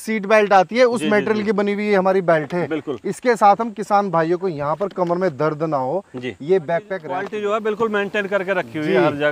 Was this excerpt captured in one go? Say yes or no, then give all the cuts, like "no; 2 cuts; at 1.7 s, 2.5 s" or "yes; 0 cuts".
no; 1 cut; at 7.3 s